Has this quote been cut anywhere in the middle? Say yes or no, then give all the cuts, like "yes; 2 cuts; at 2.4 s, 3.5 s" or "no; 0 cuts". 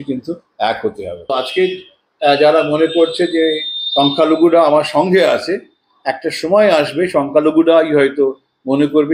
yes; 1 cut; at 1.3 s